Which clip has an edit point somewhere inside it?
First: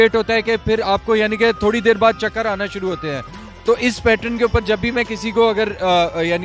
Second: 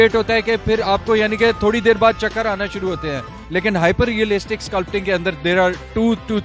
second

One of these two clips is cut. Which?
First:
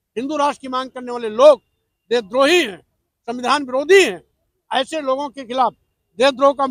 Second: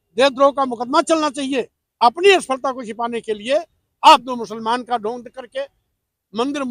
second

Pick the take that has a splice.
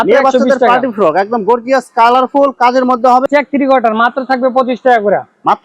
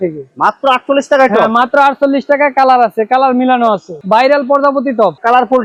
first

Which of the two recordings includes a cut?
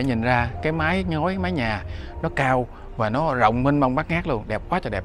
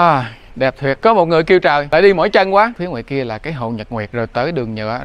second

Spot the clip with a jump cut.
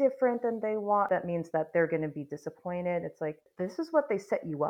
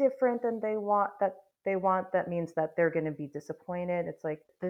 first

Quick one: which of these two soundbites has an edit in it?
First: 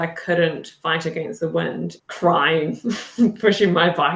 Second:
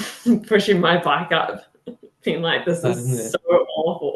first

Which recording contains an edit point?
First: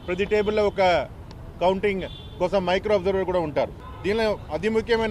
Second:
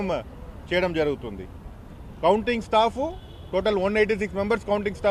first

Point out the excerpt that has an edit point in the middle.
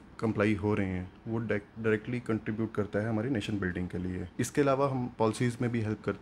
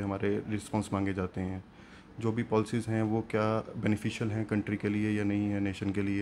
first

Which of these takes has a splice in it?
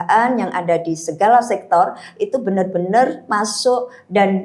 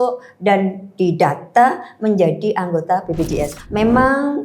second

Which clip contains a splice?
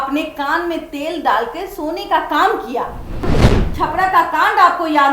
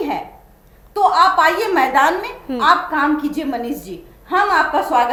first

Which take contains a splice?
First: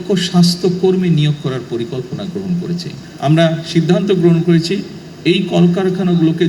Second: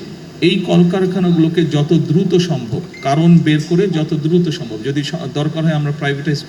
first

